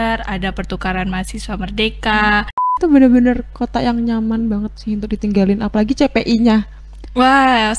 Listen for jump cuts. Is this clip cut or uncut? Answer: cut